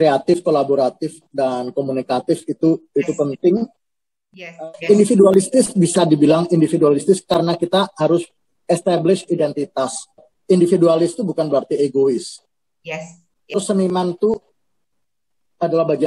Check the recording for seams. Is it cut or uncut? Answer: cut